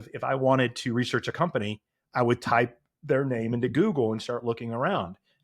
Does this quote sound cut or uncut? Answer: uncut